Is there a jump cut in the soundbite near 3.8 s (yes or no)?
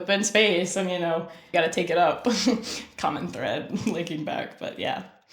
no